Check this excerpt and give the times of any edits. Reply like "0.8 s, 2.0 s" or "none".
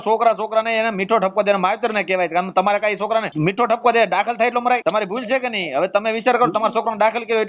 3.3 s, 4.8 s